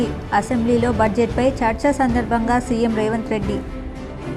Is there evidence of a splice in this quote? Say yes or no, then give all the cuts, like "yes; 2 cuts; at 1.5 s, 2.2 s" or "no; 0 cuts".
no; 0 cuts